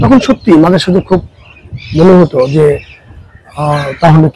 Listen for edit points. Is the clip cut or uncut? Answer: uncut